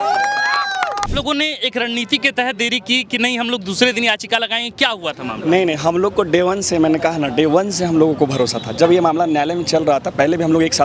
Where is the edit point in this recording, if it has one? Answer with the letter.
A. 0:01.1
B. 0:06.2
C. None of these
A